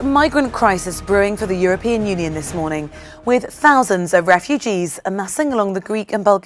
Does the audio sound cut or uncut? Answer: uncut